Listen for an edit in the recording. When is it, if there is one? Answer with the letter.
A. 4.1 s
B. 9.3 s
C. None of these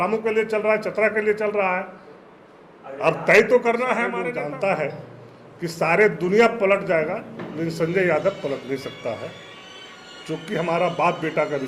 A